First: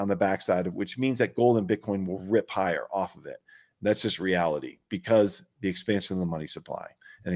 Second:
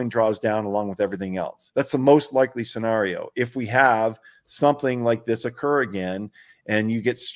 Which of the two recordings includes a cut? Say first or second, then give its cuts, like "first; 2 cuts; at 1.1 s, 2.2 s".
second; 1 cut; at 1.6 s